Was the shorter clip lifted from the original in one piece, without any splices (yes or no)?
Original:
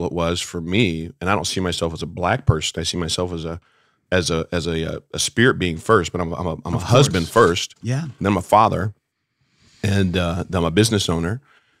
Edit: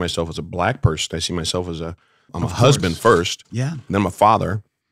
no